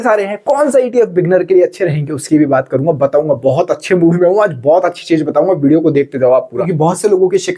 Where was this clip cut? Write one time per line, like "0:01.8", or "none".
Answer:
0:06.6

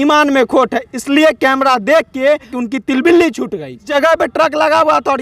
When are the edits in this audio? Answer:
0:02.5
0:03.9

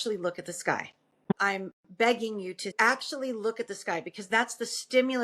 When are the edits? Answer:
0:01.3
0:02.7

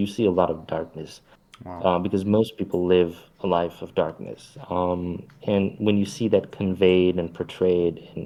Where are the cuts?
none

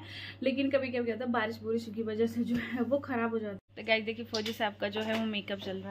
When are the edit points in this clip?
0:03.7

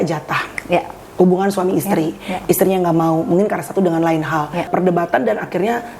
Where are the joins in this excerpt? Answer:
0:04.7

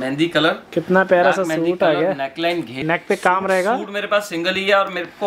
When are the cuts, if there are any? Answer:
0:02.8

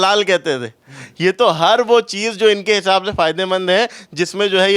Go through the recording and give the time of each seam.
none

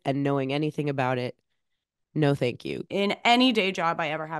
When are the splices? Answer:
0:02.8

